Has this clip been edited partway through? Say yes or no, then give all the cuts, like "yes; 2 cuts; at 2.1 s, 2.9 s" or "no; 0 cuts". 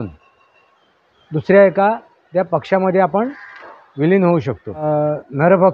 yes; 1 cut; at 4.8 s